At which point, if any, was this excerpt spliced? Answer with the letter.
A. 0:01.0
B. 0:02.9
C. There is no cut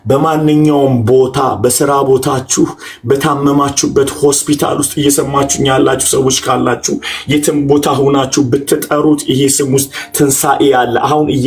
C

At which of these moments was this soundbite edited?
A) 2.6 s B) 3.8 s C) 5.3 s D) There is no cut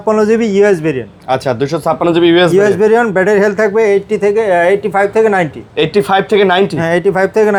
D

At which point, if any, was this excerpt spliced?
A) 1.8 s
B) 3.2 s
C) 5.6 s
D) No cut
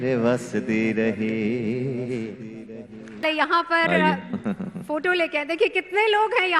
B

